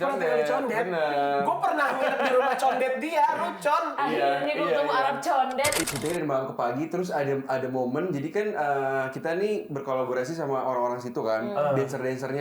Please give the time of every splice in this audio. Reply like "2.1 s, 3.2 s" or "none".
5.8 s